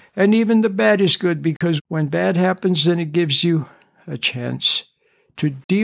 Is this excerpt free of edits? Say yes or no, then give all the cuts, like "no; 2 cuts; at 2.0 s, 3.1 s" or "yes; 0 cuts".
no; 1 cut; at 1.8 s